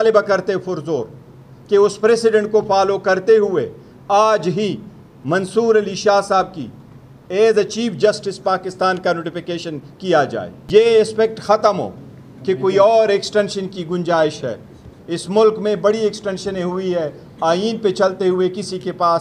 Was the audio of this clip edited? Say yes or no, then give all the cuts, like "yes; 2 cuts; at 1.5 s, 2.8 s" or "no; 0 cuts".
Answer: yes; 1 cut; at 10.5 s